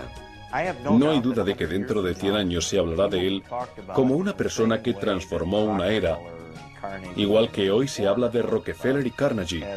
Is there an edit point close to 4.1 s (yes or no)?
yes